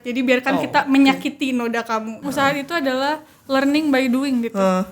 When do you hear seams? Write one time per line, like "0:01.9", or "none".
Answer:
0:02.2